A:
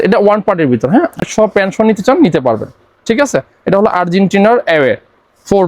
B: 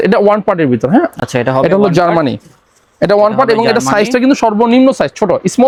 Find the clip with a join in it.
A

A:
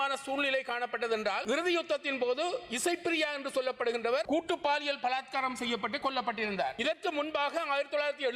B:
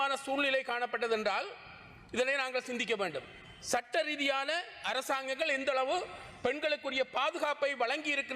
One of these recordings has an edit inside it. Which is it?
A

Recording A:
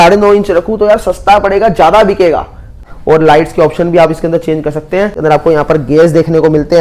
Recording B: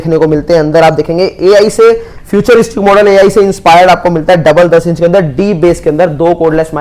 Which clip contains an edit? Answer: A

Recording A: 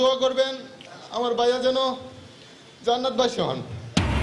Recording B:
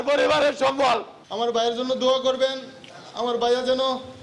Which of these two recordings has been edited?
B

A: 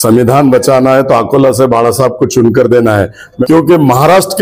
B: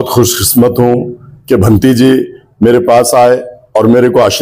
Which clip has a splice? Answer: A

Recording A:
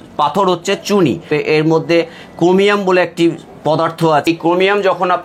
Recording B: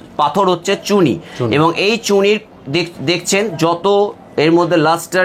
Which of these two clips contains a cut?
A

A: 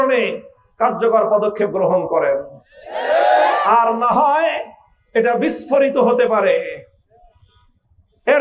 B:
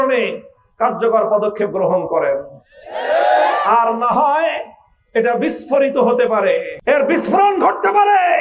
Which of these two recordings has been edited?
B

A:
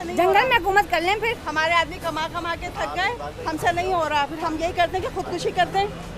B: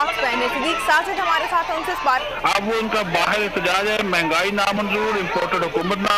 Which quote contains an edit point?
B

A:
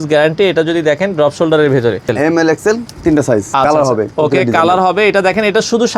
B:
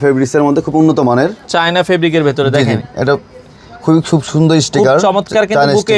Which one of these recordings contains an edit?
A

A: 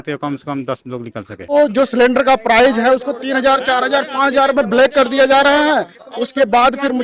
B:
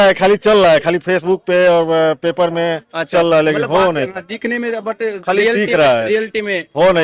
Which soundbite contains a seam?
A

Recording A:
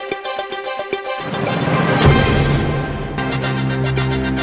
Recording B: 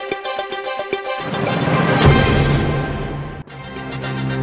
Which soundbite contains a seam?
B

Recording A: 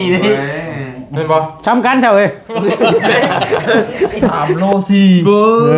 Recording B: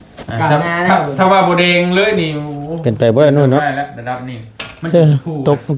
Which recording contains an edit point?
A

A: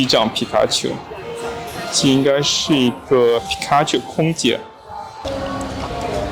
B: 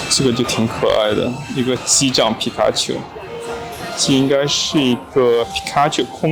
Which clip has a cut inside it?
A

